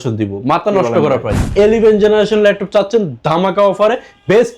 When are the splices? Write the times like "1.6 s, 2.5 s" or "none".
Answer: 1.5 s